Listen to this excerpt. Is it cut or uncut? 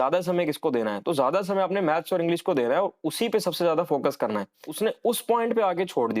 cut